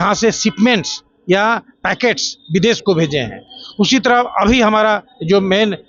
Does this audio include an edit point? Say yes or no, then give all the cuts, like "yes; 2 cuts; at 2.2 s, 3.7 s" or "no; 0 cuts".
no; 0 cuts